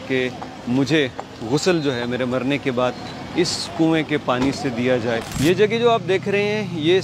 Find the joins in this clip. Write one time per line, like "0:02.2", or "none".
0:05.3